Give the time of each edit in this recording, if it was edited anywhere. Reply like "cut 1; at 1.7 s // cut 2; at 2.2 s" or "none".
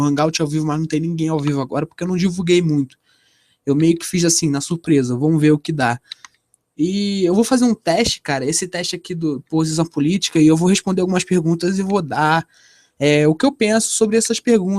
cut 1; at 3.9 s